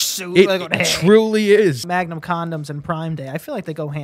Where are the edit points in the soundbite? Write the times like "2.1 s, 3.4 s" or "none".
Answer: 1.8 s